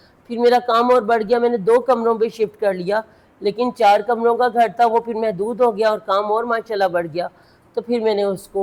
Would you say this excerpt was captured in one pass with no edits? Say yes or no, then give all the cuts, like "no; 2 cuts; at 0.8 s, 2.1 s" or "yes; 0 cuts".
yes; 0 cuts